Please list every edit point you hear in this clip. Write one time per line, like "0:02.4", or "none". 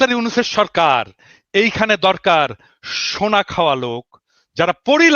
none

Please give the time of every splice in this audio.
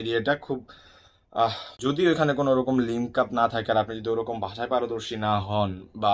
0:01.7

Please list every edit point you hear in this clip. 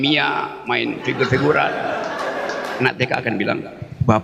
0:02.8

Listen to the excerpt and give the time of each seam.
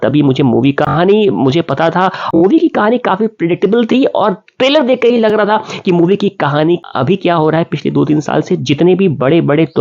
0:02.4
0:06.9

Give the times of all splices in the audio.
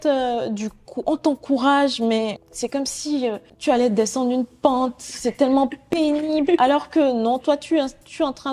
0:02.5
0:03.5

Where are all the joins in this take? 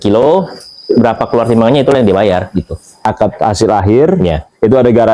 0:03.0

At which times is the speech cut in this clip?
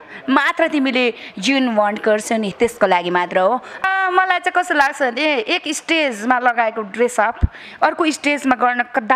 0:03.8

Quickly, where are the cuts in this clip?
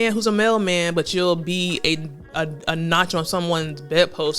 none

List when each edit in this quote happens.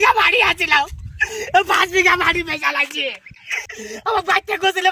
0:03.6

